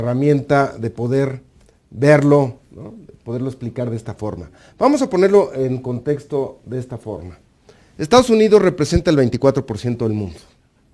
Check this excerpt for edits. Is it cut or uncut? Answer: cut